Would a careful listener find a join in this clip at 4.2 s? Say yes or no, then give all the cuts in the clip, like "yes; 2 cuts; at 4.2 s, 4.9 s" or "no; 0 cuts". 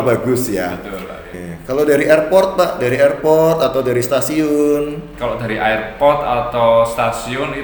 no; 1 cut; at 1.4 s